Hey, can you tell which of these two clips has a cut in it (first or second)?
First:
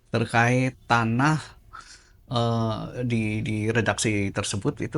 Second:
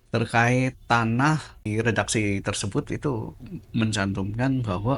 second